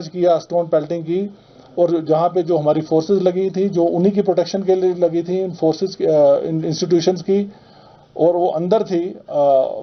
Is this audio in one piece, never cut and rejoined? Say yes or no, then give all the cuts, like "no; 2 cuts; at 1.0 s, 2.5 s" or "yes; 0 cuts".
yes; 0 cuts